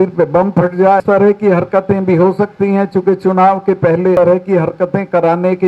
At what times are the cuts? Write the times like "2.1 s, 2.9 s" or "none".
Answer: 1.0 s, 4.2 s